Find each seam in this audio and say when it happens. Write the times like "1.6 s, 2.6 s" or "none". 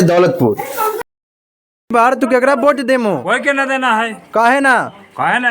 1.5 s